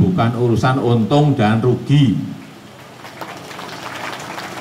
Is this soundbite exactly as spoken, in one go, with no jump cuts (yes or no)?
yes